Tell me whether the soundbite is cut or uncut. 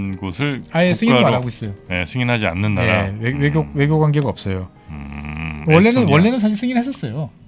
uncut